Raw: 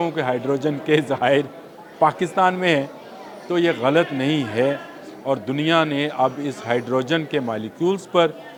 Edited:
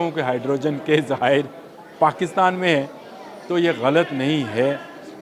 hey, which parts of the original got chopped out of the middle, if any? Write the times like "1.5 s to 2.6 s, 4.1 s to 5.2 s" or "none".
none